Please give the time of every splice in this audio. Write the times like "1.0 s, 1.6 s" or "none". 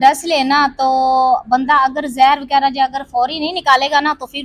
none